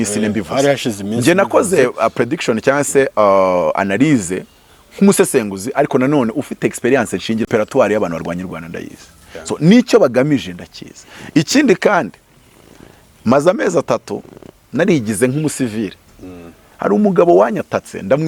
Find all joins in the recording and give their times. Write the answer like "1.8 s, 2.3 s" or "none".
none